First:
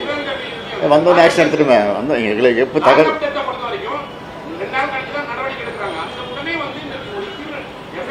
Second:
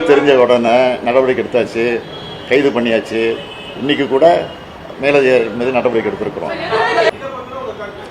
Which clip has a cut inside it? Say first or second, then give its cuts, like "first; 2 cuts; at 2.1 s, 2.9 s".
second; 1 cut; at 7.1 s